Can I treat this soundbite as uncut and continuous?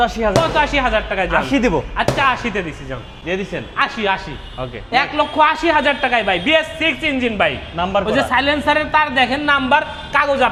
yes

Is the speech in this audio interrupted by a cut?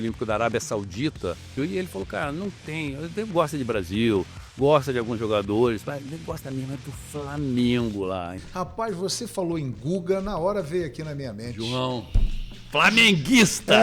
yes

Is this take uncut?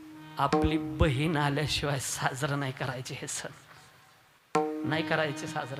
yes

